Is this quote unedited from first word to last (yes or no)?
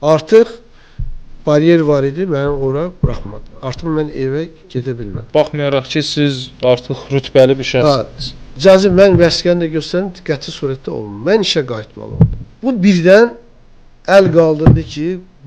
no